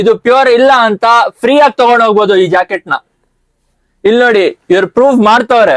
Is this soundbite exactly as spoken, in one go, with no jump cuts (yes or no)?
yes